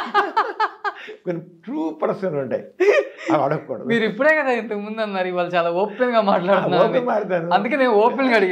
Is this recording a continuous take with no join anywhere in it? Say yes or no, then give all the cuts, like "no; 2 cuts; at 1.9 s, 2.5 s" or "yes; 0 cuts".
yes; 0 cuts